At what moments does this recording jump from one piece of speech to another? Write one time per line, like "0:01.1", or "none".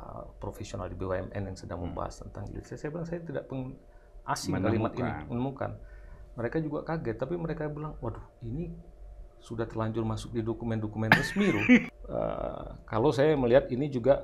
0:11.9